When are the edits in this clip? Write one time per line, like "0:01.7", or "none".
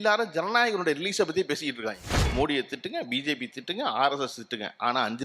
0:02.1